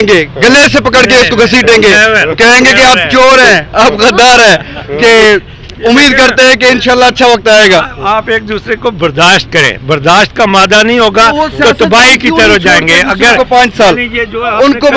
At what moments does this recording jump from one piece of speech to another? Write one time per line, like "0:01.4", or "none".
none